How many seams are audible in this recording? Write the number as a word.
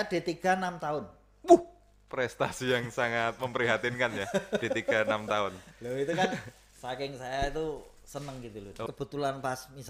one